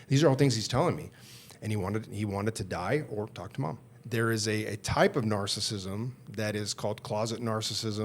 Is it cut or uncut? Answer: cut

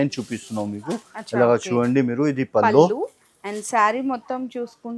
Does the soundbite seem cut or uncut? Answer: uncut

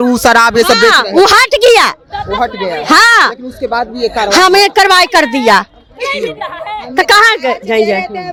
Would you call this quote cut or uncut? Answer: uncut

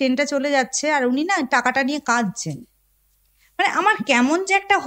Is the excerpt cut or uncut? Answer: uncut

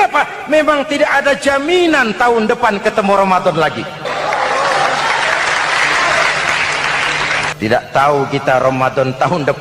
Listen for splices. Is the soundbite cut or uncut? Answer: cut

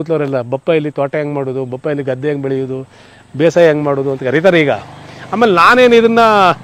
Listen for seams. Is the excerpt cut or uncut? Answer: uncut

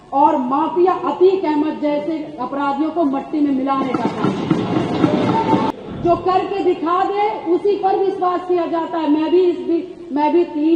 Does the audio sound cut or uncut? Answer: cut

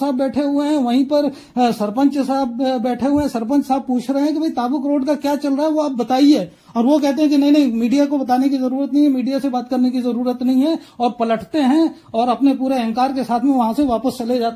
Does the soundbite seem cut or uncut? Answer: uncut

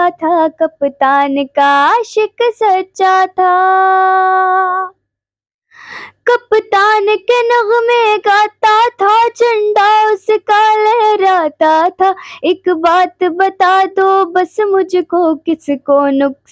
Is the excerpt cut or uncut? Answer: uncut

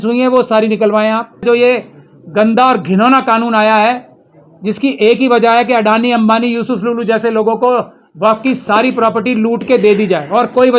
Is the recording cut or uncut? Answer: cut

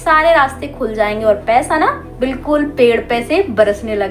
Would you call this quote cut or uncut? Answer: uncut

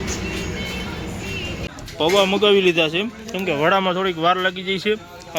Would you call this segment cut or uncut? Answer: uncut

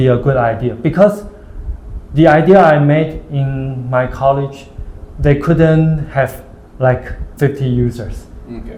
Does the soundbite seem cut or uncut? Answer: uncut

